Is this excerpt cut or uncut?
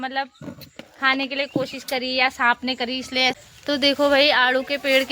cut